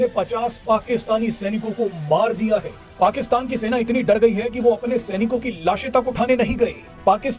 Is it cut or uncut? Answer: uncut